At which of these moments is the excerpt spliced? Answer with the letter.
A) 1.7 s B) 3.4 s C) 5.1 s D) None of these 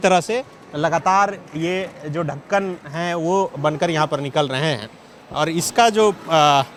D